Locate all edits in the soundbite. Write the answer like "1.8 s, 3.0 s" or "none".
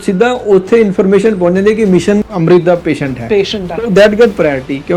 2.3 s